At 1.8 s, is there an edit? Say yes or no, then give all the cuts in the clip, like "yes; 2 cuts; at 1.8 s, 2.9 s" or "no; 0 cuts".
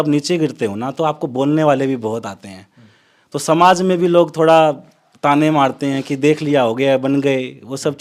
no; 0 cuts